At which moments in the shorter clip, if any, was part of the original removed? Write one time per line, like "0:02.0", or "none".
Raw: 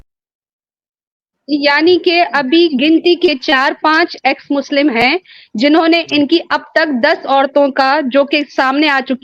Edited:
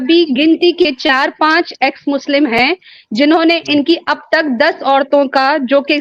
none